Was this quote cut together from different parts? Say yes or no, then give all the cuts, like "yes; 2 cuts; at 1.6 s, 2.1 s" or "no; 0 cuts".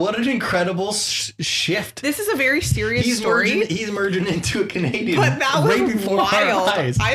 no; 0 cuts